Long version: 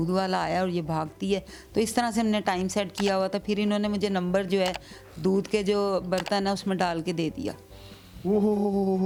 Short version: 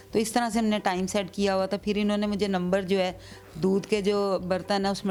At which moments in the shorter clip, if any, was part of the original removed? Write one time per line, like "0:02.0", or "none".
none

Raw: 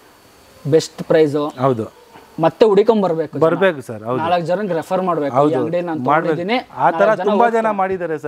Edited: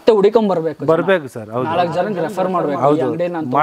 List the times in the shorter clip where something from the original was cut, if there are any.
none

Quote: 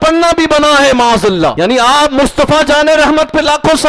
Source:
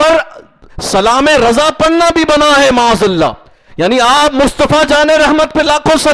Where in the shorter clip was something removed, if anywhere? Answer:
0:01.5

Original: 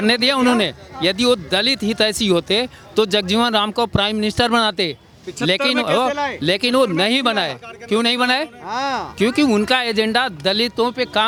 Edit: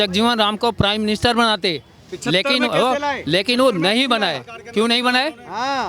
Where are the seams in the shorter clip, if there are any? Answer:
none

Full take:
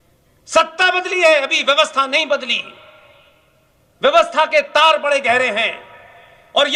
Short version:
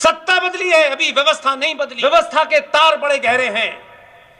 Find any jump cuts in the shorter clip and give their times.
0:01.9

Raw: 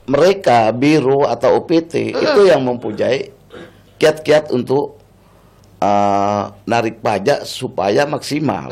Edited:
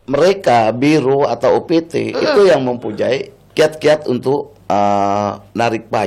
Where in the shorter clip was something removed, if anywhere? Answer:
0:03.4
0:04.5

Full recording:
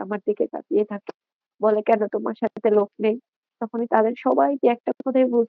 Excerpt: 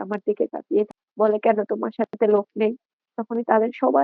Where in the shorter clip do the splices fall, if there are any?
0:01.0

